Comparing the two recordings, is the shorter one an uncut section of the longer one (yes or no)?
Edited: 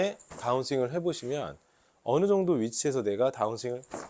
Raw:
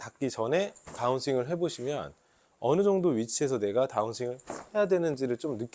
yes